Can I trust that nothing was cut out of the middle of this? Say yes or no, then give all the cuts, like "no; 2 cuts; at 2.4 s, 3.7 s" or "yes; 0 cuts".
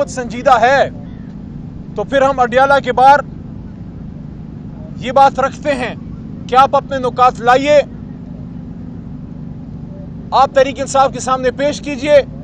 yes; 0 cuts